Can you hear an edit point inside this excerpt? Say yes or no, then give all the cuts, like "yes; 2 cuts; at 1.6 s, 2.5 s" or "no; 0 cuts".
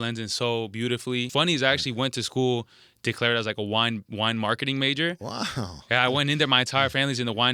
yes; 1 cut; at 1.3 s